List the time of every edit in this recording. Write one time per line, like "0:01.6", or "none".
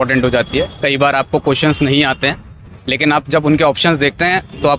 none